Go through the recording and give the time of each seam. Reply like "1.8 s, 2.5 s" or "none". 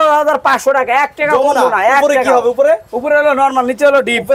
none

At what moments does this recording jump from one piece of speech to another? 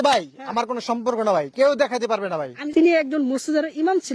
2.6 s

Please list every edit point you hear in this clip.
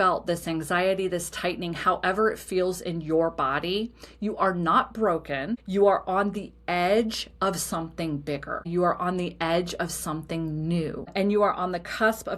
5.6 s, 8.7 s, 11.1 s

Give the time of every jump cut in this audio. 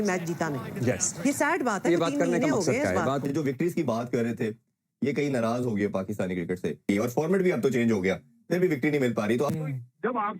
3.2 s, 6.7 s

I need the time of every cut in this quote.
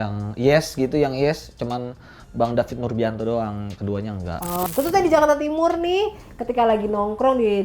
4.7 s

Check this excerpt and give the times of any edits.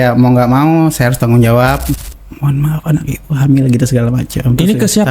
1.9 s

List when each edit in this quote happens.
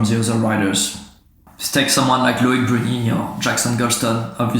1.4 s

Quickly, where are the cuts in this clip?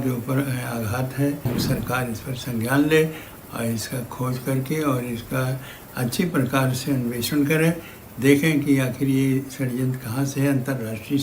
1.5 s

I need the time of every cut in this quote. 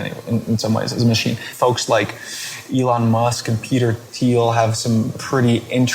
1.5 s

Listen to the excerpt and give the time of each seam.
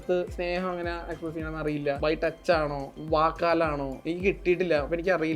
2.0 s, 2.9 s, 3.9 s

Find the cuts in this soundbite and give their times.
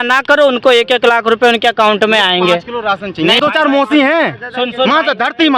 3.4 s

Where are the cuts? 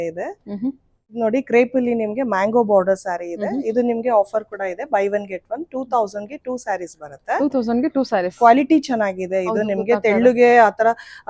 1.1 s

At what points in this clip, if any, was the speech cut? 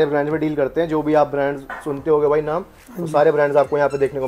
none

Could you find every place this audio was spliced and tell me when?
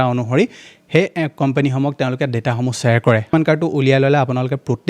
3.2 s

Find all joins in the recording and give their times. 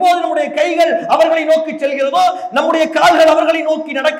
none

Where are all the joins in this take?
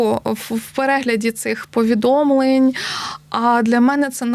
none

